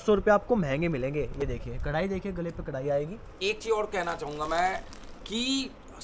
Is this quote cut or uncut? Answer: uncut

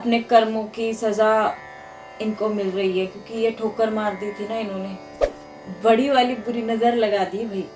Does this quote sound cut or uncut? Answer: cut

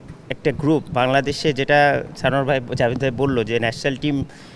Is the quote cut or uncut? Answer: uncut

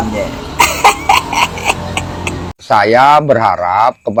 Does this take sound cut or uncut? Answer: uncut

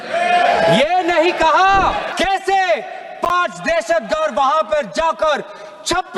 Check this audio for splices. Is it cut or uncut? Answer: cut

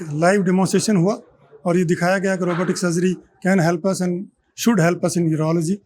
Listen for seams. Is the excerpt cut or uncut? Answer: uncut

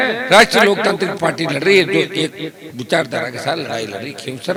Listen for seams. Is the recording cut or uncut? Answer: uncut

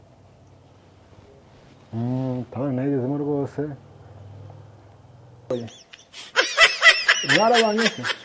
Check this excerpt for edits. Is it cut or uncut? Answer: cut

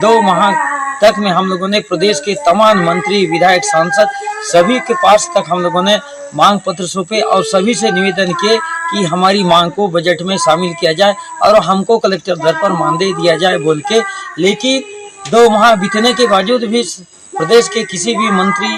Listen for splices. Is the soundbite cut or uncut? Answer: uncut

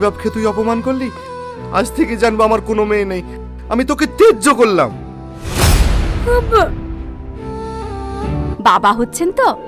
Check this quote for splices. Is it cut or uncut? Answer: cut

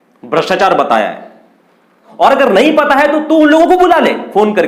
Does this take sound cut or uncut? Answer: cut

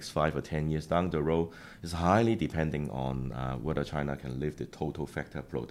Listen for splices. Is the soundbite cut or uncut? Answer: uncut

